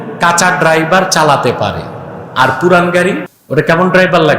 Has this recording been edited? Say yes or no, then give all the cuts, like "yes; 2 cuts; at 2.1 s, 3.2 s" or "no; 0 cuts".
yes; 1 cut; at 3.3 s